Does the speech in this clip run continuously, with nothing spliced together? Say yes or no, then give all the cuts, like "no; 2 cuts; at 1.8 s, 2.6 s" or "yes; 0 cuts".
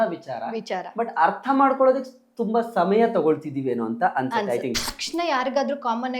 no; 1 cut; at 4.8 s